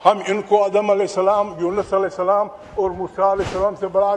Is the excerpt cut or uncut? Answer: uncut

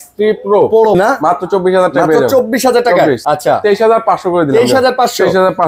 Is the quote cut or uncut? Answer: cut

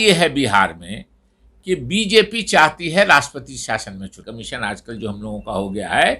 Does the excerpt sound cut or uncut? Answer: cut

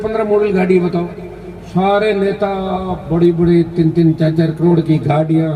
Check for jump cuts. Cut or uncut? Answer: uncut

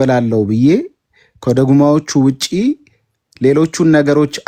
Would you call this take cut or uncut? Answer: uncut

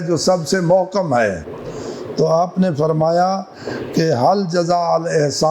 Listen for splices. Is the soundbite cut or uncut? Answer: uncut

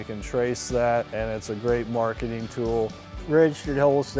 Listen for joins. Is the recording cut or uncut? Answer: cut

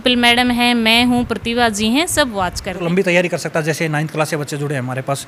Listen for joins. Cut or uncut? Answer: cut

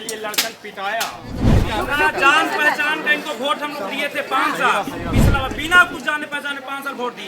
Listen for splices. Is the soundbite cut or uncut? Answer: cut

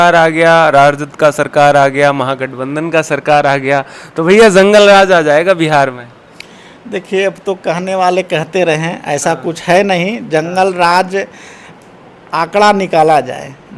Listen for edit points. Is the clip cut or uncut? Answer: uncut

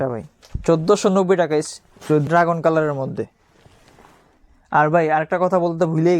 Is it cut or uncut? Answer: cut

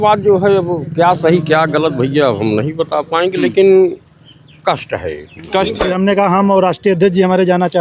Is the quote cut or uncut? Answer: cut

